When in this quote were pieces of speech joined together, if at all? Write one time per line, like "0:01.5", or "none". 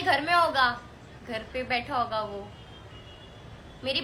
none